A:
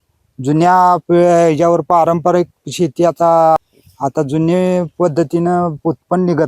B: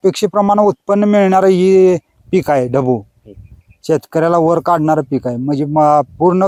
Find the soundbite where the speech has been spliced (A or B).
A